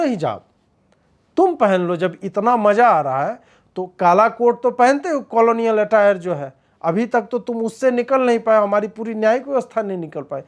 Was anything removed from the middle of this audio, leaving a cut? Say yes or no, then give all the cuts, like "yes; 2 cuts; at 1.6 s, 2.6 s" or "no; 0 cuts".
no; 0 cuts